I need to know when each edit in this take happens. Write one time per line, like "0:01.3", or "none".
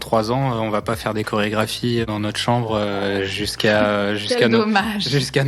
0:02.0